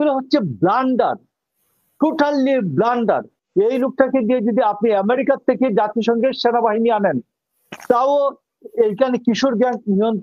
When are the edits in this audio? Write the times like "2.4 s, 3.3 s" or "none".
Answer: 3.4 s